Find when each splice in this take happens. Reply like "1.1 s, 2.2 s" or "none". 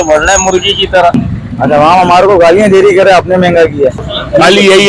1.2 s, 4.1 s